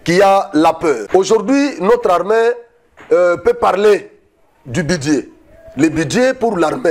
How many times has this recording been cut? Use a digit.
1